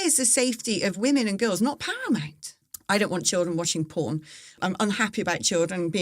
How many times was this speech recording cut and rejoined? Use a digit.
2